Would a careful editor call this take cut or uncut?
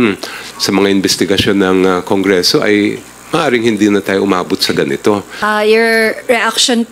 cut